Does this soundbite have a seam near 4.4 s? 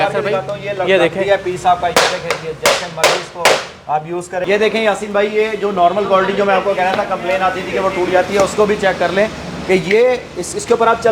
yes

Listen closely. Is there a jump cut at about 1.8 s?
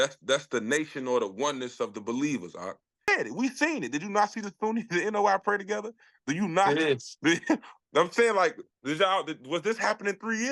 no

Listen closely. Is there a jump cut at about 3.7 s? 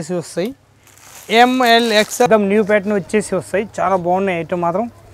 no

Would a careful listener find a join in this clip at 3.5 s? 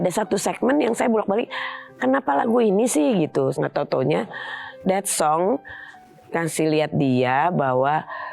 yes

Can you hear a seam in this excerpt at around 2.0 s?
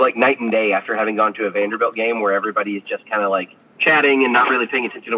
no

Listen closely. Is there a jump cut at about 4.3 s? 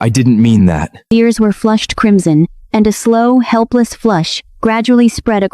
no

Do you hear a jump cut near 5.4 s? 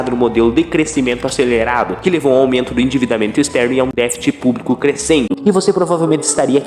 yes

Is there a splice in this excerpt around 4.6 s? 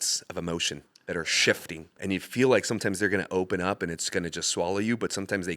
no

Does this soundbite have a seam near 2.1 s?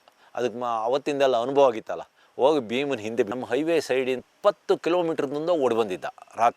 no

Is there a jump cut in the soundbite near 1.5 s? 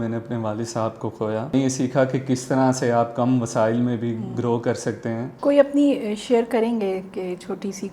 yes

